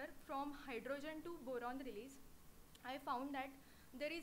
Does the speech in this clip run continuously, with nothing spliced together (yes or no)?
no